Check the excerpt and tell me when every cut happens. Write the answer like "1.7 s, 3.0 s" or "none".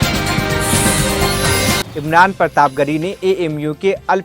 1.8 s